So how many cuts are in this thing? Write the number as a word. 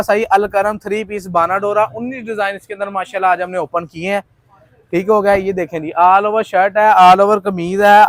zero